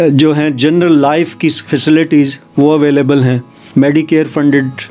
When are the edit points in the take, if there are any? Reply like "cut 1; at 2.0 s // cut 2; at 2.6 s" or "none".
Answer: cut 1; at 3.5 s

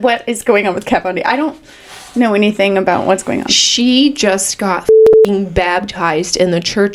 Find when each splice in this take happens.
none

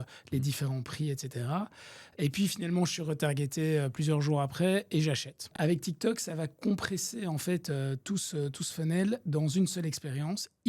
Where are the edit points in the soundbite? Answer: cut 1; at 5.5 s

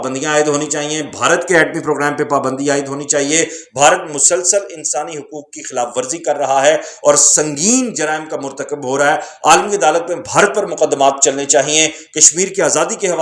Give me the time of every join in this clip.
none

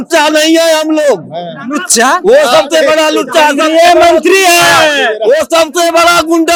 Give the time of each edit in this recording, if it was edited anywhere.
none

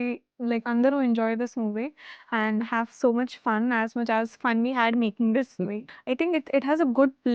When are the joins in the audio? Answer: cut 1; at 5.9 s

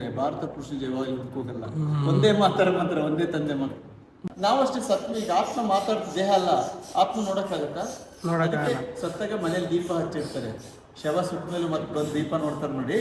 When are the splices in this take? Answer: cut 1; at 4.2 s

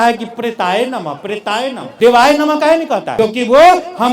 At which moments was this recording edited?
cut 1; at 1.8 s // cut 2; at 3.1 s

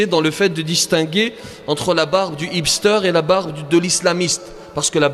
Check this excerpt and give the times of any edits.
none

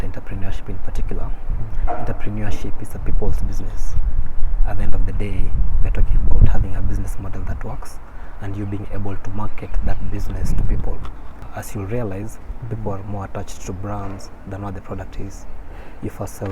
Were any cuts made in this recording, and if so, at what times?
cut 1; at 11.3 s

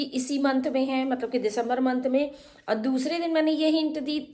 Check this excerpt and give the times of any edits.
none

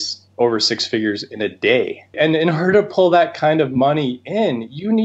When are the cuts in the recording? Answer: cut 1; at 2.1 s

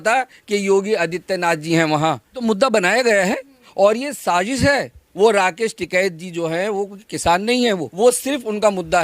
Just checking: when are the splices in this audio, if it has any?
cut 1; at 2.4 s // cut 2; at 5.0 s // cut 3; at 7.9 s

